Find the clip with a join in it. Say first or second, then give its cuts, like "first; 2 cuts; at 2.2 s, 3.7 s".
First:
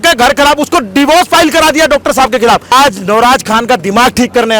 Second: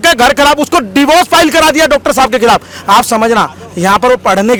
first; 1 cut; at 2.7 s